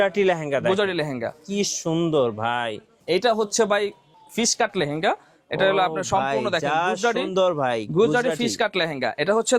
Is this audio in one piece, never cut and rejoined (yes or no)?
no